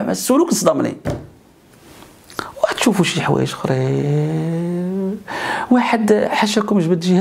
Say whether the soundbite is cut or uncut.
uncut